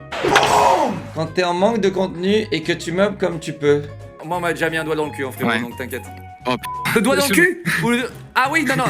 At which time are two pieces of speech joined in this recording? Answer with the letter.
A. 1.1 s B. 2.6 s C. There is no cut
A